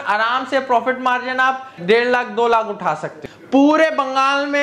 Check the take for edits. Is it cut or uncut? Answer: cut